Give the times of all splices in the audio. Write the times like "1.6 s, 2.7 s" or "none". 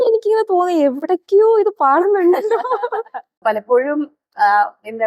3.4 s